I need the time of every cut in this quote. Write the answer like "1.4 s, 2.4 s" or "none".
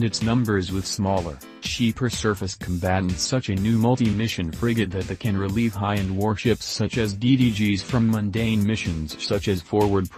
none